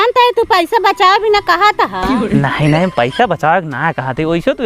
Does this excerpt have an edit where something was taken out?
no; 0 cuts

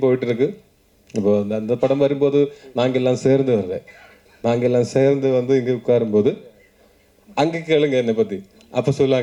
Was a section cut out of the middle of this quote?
no; 0 cuts

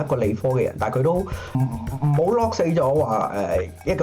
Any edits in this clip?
yes; 1 cut; at 1.6 s

